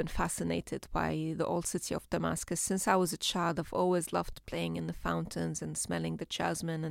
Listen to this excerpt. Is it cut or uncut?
uncut